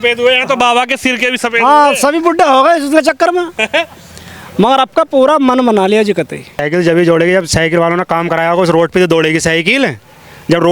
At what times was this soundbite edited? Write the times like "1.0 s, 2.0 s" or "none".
6.6 s

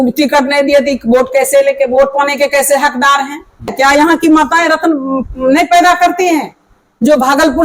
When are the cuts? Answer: 3.7 s

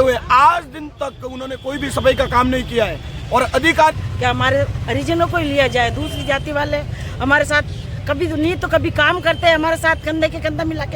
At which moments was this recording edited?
3.9 s

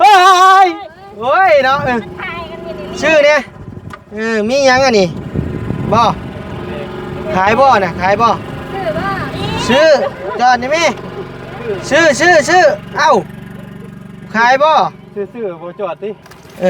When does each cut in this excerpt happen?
none

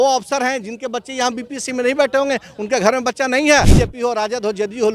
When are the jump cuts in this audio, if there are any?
3.7 s

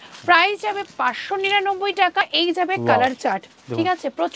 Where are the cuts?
2.3 s

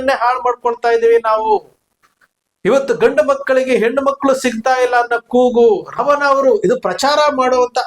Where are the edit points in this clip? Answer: 6.0 s

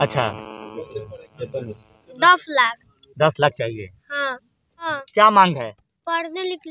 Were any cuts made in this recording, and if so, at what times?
4.9 s

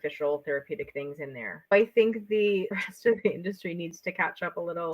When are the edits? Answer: 1.7 s, 2.8 s

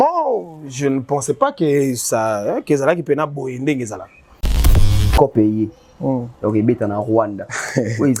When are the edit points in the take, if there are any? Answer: 4.7 s

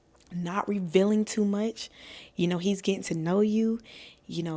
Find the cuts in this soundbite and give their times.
none

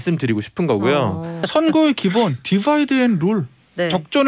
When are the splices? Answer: 1.4 s

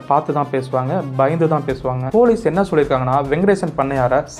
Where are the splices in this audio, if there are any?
2.0 s

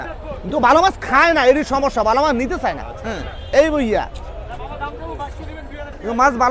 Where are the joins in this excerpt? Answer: none

